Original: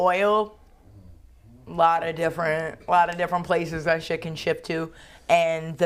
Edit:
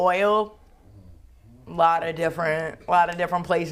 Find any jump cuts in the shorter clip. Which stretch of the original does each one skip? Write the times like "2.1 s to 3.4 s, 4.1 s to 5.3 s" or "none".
none